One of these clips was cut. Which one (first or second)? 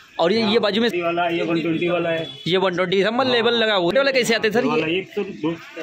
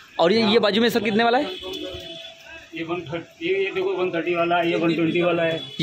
first